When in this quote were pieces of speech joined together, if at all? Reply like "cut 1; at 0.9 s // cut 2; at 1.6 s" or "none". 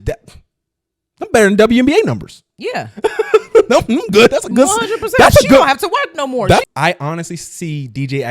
cut 1; at 6.7 s